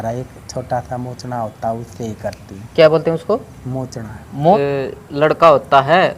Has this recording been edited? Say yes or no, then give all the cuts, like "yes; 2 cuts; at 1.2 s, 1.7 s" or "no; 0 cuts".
yes; 1 cut; at 4.5 s